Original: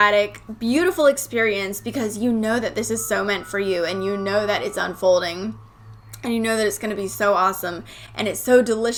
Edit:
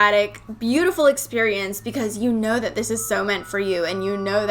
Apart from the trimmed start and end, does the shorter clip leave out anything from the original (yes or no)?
no